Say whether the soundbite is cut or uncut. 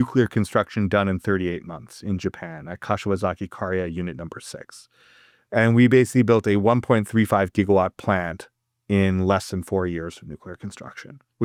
uncut